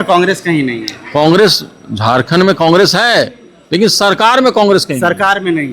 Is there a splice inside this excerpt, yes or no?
no